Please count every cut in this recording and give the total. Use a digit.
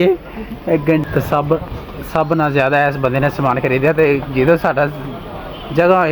1